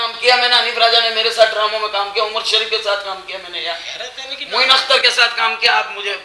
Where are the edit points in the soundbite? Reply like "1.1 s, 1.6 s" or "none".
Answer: none